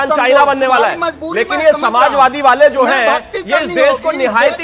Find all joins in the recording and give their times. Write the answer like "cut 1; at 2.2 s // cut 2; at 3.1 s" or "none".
none

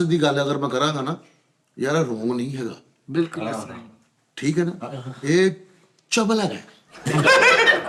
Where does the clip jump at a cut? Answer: none

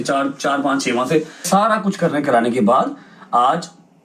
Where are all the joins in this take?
cut 1; at 1.4 s

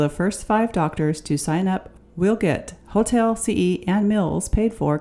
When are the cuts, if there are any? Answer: cut 1; at 1.9 s

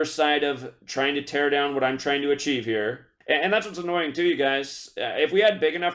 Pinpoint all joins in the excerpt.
cut 1; at 3.1 s

